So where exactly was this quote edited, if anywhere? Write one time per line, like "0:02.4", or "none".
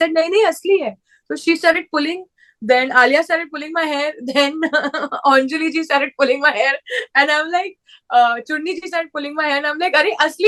none